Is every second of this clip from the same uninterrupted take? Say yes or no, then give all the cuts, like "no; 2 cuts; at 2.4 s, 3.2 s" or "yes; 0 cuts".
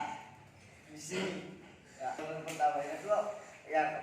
no; 1 cut; at 2.2 s